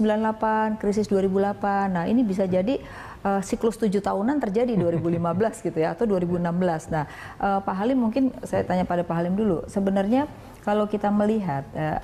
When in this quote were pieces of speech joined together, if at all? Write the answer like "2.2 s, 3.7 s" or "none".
none